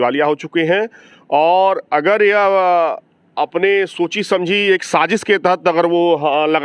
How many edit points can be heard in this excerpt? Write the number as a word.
zero